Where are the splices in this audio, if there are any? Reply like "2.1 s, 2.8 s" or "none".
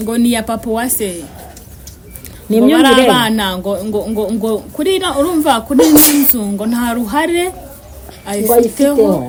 none